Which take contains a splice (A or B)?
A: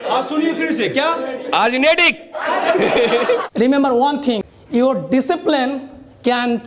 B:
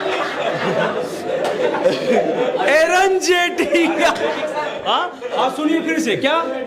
A